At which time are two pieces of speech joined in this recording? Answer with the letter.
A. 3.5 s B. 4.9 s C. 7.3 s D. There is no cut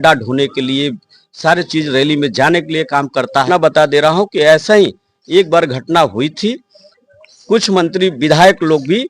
A